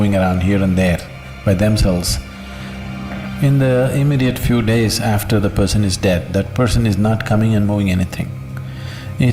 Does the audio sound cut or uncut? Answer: uncut